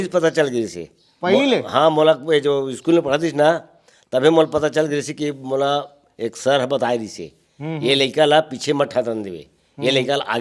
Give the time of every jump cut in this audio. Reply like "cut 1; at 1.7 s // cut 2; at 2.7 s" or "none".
none